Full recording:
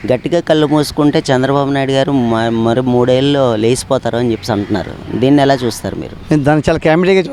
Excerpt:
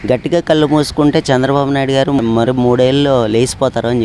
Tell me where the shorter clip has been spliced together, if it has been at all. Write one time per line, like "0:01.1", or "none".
0:02.2